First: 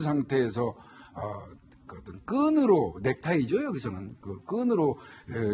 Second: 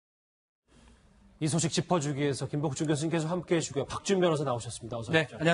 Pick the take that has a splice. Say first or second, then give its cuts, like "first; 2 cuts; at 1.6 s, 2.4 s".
second; 1 cut; at 1.4 s